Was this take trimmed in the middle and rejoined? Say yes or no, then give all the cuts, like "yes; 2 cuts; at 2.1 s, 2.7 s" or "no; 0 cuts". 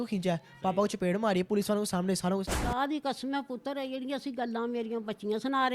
yes; 1 cut; at 2.6 s